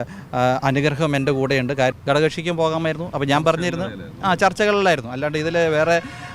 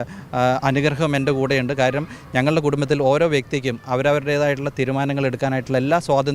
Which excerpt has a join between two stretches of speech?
first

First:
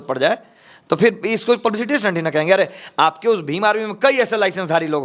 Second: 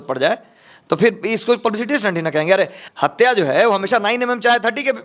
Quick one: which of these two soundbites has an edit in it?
second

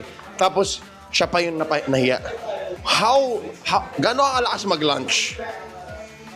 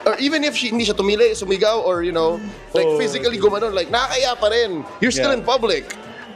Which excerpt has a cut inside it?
first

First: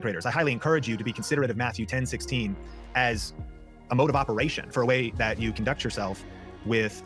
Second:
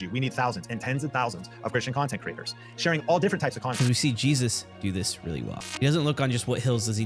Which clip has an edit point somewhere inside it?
second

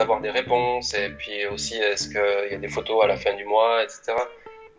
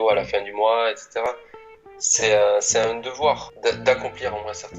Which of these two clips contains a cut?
second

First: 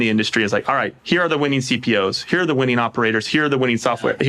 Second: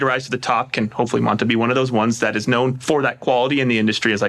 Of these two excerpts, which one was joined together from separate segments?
second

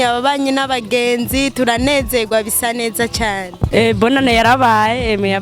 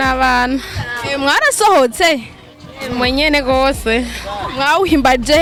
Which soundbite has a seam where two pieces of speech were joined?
first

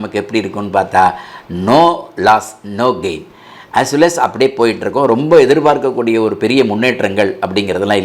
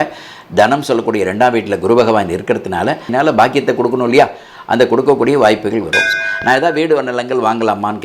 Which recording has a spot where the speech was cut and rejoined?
second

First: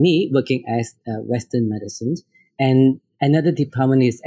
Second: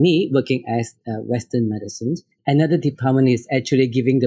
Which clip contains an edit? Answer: second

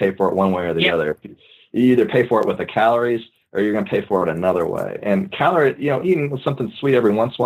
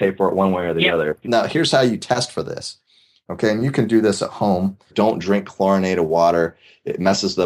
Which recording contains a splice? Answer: second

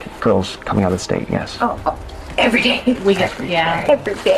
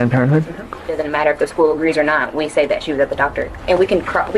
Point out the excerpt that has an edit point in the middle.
second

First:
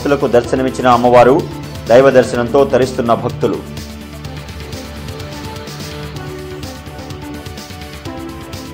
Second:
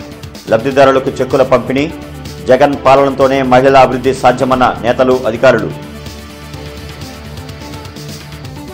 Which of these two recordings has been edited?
first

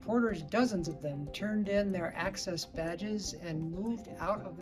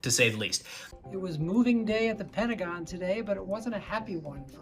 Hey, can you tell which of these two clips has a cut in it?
second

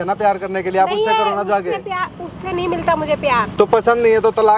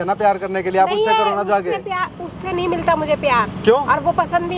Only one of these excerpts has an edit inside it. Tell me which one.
first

